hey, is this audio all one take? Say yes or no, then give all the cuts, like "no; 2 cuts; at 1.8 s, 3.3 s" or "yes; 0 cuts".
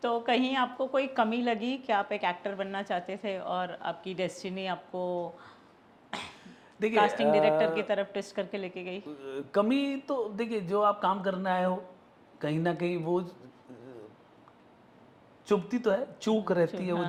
yes; 0 cuts